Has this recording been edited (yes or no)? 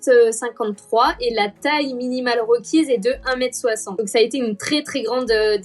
yes